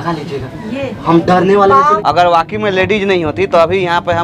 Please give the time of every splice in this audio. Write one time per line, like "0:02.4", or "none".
0:01.9